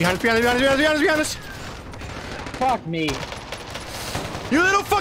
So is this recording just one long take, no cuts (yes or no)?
yes